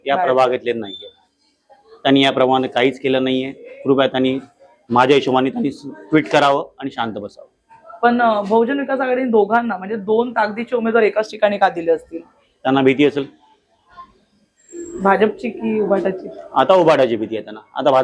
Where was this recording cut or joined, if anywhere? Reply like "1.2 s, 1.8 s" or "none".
none